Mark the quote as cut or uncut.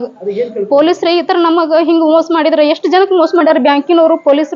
uncut